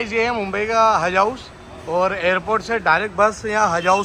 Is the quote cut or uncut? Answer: uncut